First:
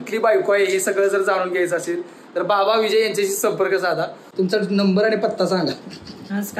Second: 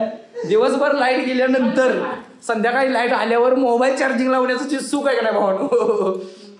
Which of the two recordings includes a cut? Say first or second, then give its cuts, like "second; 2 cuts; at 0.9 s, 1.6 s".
first; 1 cut; at 4.2 s